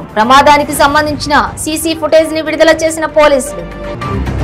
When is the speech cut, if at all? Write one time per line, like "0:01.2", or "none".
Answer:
none